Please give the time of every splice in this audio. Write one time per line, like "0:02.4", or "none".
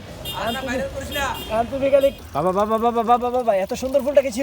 0:02.2